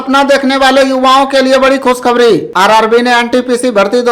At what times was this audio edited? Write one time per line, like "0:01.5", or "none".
0:02.5